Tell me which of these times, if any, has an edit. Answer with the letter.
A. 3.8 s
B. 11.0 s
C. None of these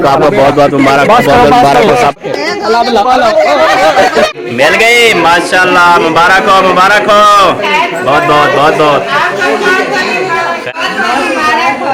C